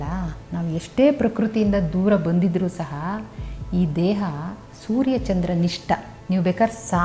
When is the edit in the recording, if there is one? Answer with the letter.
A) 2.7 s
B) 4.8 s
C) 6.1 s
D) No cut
C